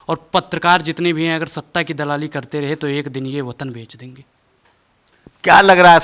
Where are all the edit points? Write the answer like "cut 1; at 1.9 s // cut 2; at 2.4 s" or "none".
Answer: none

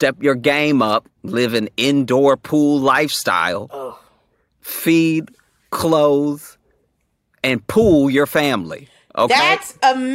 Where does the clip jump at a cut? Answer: cut 1; at 1.2 s

